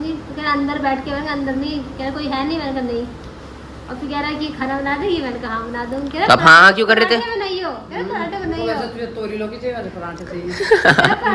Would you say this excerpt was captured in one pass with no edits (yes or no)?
yes